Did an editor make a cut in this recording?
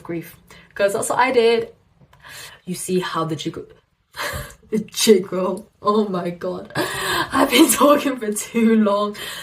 yes; 1 cut; at 1.9 s

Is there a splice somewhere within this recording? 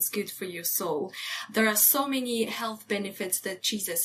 no; 0 cuts

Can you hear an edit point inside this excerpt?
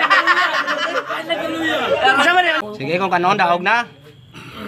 yes; 1 cut; at 2.6 s

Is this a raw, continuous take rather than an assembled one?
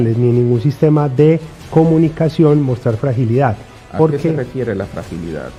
yes; 0 cuts

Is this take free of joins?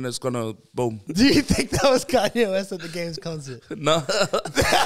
no; 1 cut; at 1.0 s

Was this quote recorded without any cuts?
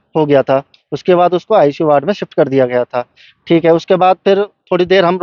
yes; 0 cuts

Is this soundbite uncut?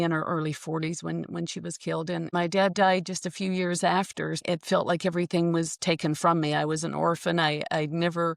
no; 2 cuts; at 2.3 s, 4.4 s

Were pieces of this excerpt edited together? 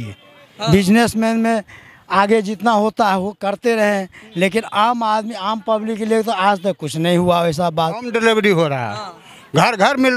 yes; 1 cut; at 8.1 s

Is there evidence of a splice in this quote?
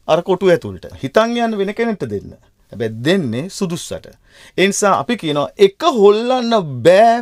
yes; 1 cut; at 0.9 s

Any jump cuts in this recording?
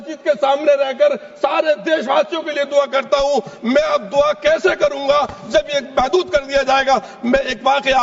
no; 0 cuts

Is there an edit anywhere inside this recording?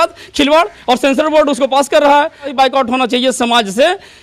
yes; 1 cut; at 2.5 s

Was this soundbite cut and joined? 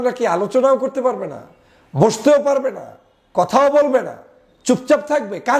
no; 0 cuts

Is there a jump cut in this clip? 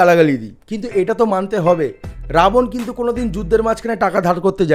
no; 0 cuts

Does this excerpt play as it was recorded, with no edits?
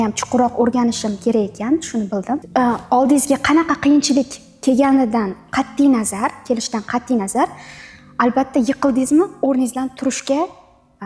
no; 1 cut; at 2.4 s

